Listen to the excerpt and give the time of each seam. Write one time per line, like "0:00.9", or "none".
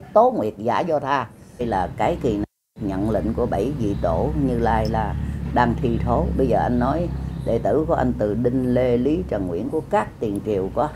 0:01.6